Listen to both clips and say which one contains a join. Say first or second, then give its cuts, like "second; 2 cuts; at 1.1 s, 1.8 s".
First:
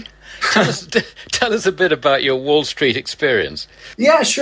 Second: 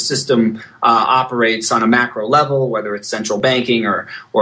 first; 1 cut; at 1.4 s